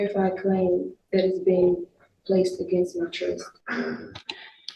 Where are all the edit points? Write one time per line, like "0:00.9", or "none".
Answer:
none